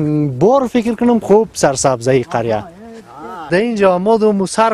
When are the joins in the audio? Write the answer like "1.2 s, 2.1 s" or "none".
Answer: 3.5 s